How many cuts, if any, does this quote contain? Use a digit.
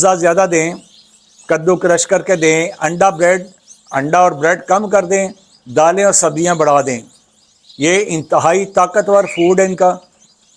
0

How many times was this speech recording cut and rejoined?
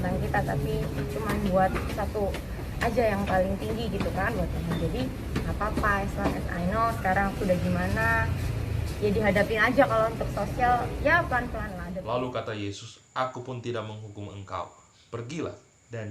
1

